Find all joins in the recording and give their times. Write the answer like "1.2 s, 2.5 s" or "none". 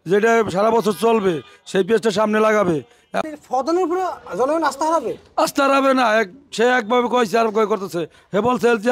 3.2 s